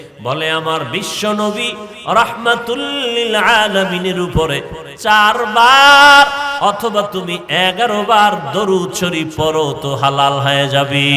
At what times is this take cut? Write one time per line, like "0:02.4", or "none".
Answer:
none